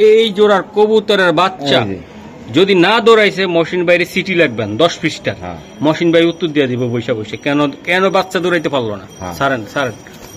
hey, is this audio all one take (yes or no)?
yes